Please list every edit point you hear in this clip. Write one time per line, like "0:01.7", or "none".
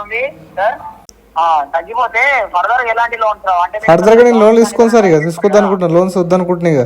0:01.2